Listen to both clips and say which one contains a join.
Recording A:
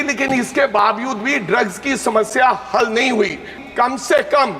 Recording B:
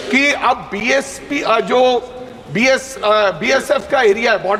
A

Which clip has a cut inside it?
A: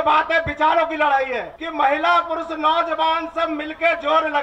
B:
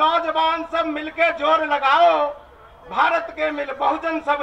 A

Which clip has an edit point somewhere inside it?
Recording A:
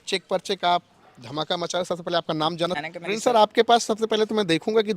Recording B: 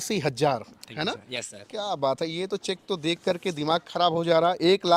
A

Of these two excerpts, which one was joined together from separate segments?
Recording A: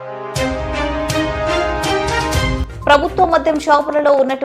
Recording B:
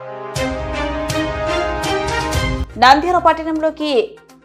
A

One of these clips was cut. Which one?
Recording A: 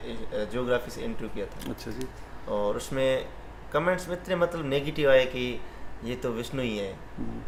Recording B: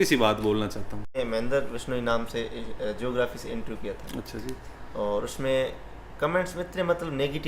B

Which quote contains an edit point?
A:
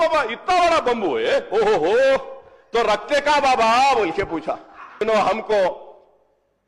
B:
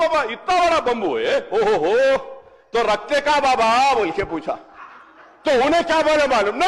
A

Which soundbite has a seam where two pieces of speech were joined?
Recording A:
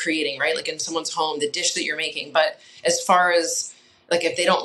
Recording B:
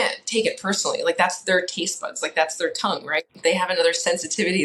B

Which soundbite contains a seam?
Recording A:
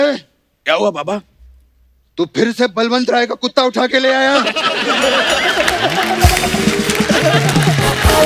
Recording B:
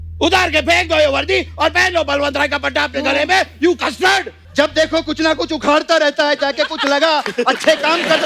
B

